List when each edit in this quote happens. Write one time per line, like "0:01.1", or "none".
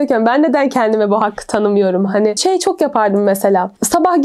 none

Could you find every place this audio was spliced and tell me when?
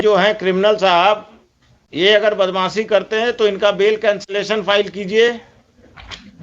none

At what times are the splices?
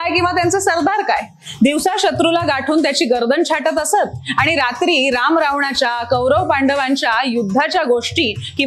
none

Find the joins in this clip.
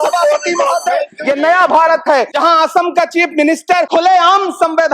0:01.1
0:02.3
0:03.9

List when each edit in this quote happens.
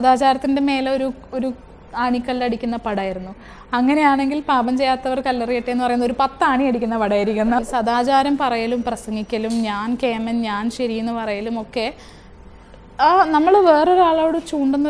0:07.6

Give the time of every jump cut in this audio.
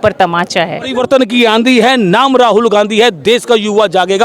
0:01.0

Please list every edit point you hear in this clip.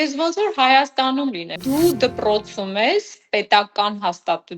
0:01.5

